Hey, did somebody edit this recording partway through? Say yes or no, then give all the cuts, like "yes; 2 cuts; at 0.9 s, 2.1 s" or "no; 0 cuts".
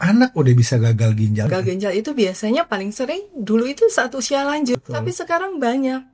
yes; 2 cuts; at 1.5 s, 4.7 s